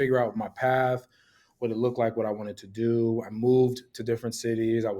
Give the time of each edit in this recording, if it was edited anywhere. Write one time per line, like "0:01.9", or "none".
none